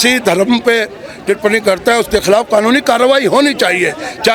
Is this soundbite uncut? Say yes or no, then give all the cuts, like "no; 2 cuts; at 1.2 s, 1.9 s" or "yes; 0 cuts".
yes; 0 cuts